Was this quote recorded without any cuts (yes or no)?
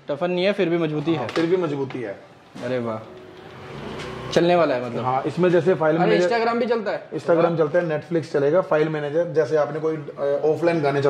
yes